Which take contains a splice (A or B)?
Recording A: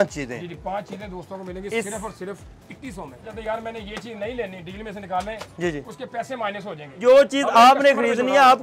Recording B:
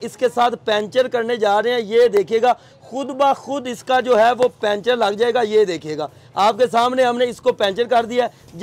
A